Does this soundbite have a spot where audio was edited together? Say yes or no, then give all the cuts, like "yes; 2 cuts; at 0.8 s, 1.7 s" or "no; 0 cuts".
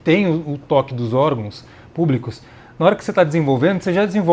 no; 0 cuts